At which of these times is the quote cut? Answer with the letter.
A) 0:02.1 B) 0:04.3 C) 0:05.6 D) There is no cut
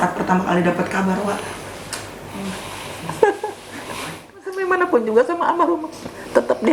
B